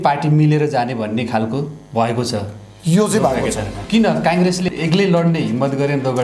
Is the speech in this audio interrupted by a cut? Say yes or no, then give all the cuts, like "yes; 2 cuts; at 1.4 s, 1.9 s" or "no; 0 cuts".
yes; 1 cut; at 3.8 s